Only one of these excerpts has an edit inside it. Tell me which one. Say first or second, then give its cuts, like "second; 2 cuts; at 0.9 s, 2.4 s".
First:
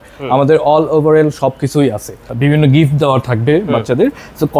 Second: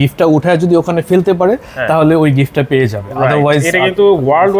first; 1 cut; at 2.3 s